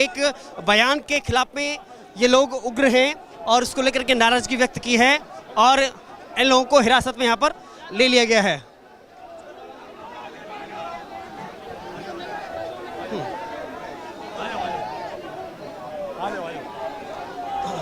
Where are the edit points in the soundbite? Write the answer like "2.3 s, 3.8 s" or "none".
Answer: none

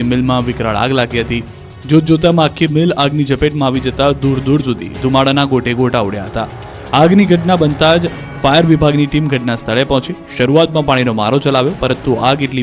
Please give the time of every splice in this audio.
3.7 s

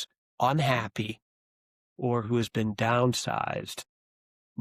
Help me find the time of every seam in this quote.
none

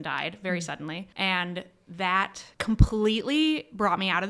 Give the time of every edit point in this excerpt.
1.1 s, 2.5 s

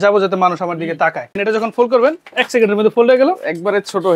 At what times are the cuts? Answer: 1.4 s

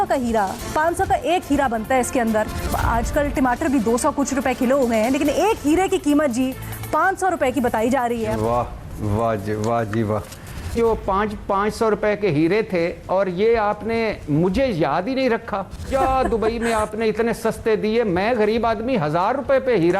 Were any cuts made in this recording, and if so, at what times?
2.7 s, 8.3 s, 10.7 s, 15.9 s

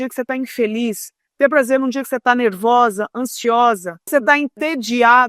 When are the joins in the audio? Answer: 4.0 s

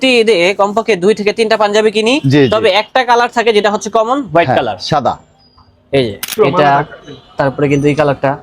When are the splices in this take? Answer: 6.3 s

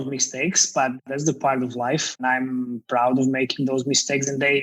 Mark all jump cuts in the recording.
1.1 s, 2.2 s

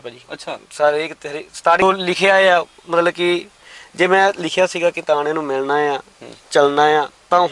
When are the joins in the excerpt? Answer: 1.8 s

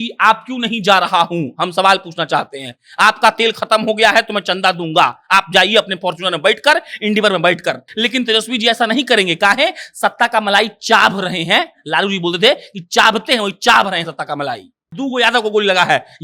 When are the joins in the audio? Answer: 7.9 s, 14.9 s

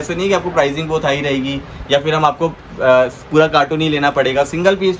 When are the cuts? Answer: none

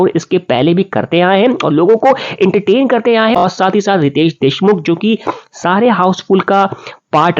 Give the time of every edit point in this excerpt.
3.4 s

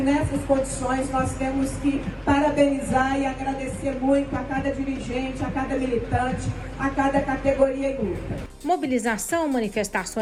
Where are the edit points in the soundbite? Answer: none

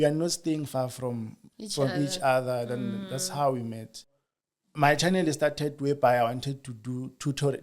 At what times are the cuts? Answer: 4.2 s

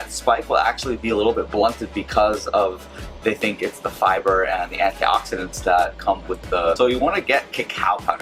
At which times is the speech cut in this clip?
6.8 s

